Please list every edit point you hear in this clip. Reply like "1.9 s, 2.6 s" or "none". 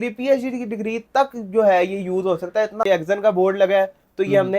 2.8 s